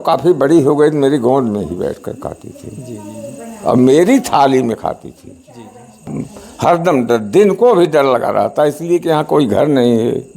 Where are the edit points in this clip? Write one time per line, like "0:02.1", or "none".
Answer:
0:06.1